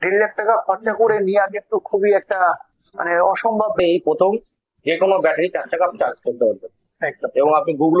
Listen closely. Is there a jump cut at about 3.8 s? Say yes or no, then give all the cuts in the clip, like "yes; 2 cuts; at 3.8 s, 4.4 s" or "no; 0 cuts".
yes; 1 cut; at 3.8 s